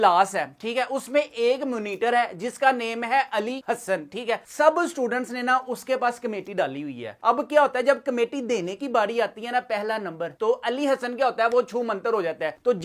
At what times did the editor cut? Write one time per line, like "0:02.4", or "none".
none